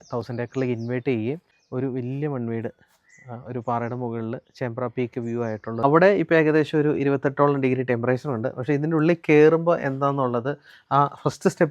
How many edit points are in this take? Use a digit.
2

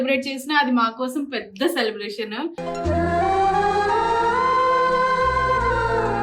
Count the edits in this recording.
0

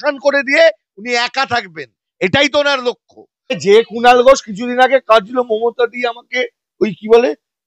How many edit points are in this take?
1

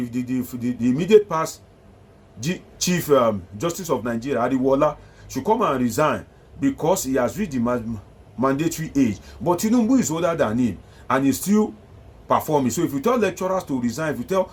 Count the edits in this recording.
0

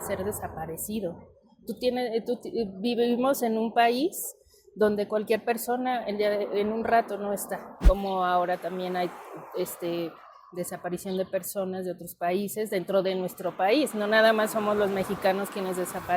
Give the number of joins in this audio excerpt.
1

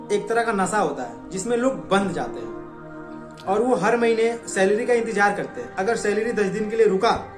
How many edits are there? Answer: 0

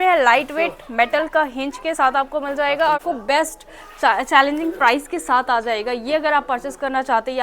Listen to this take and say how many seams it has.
1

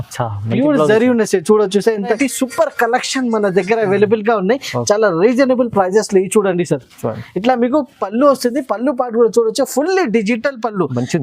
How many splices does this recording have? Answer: 1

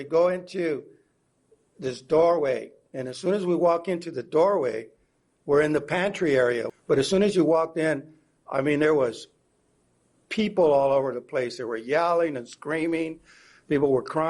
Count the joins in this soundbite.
1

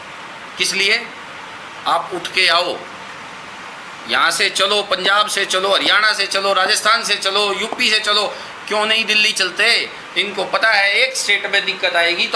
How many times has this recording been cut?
0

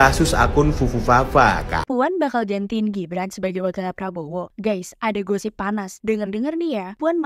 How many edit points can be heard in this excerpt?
1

